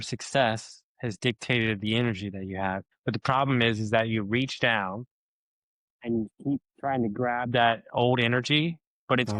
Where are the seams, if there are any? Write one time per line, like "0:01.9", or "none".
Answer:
0:02.9